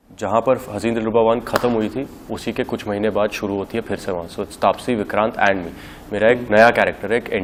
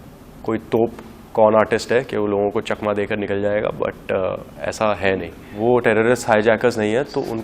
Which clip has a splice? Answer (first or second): second